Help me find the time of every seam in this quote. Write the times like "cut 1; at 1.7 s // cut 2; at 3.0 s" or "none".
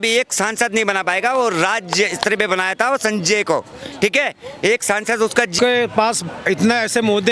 cut 1; at 5.6 s